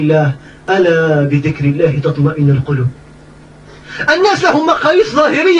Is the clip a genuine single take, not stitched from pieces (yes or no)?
yes